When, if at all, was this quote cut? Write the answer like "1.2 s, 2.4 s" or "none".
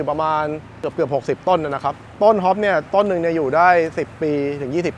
none